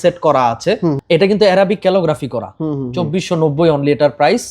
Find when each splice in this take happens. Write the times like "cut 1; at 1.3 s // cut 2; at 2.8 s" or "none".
cut 1; at 1.0 s